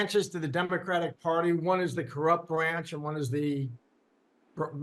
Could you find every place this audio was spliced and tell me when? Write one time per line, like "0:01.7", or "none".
none